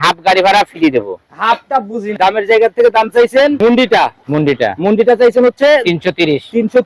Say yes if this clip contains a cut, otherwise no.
yes